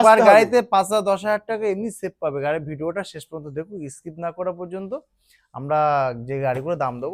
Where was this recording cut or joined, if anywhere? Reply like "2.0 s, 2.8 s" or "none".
none